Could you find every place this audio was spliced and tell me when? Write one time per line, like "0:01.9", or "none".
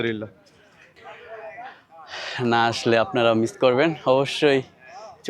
0:00.9